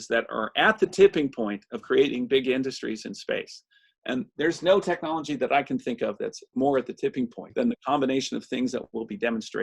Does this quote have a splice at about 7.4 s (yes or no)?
yes